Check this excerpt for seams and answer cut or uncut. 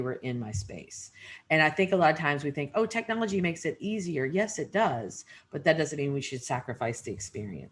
uncut